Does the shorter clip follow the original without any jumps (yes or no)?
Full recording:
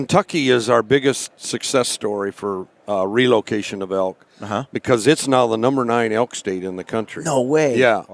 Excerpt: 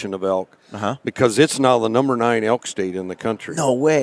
yes